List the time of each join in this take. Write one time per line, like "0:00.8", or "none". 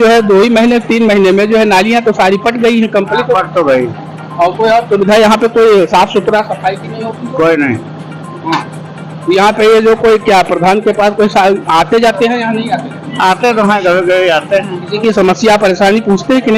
none